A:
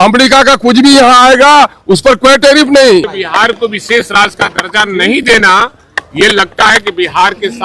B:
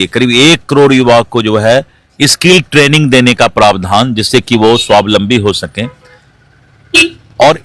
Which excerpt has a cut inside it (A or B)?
A